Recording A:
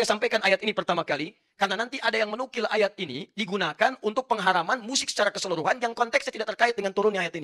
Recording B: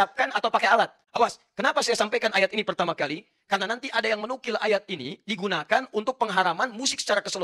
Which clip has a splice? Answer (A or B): B